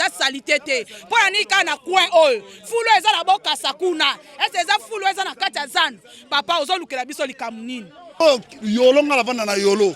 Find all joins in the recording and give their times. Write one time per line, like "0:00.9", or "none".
0:08.2